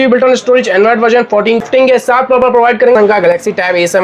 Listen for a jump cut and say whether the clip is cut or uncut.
cut